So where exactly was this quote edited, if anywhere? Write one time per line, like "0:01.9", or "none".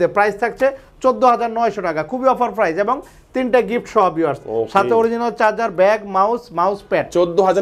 none